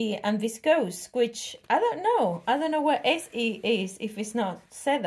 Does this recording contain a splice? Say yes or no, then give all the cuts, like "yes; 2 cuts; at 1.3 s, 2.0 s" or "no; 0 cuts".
no; 0 cuts